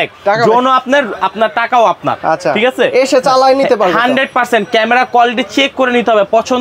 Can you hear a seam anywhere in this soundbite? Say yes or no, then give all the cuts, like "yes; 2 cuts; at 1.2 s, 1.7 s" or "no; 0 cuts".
no; 0 cuts